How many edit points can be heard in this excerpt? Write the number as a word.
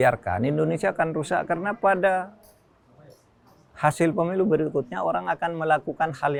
zero